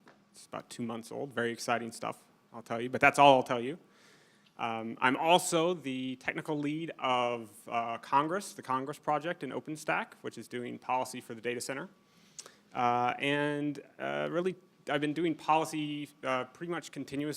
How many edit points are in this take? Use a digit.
1